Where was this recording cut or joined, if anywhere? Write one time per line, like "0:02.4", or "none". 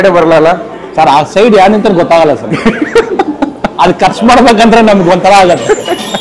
none